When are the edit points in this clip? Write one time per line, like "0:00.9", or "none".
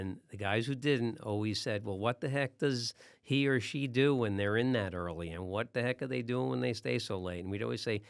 none